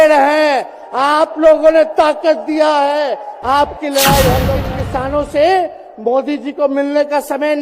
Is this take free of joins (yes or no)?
no